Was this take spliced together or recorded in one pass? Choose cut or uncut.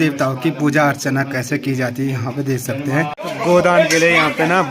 cut